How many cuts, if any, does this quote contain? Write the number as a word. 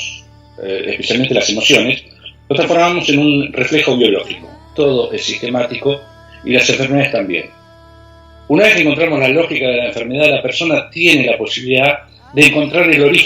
one